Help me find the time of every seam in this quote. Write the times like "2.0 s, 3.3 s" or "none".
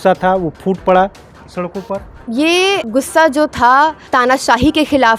2.1 s, 2.9 s, 4.0 s

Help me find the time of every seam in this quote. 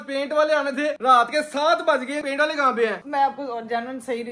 3.0 s

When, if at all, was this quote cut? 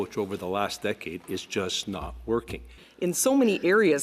2.8 s

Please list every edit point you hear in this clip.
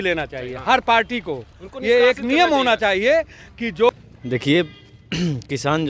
3.9 s

